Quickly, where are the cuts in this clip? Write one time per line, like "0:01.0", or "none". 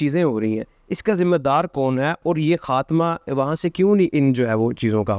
none